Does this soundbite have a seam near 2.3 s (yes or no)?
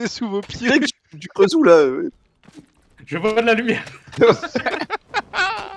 yes